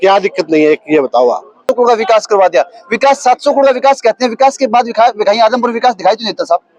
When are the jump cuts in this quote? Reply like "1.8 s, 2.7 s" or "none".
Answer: 1.7 s